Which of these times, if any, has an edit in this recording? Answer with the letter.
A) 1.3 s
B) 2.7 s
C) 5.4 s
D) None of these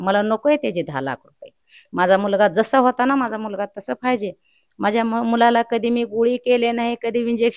D